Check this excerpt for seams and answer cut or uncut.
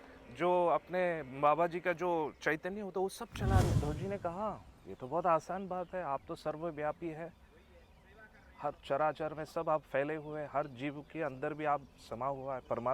cut